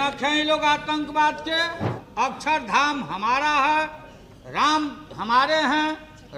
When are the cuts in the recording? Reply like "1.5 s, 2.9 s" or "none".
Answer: 2.0 s